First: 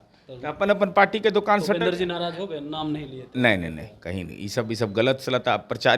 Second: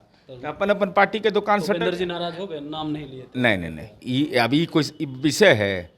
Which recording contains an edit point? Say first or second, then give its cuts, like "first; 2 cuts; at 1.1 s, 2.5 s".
second; 1 cut; at 3.9 s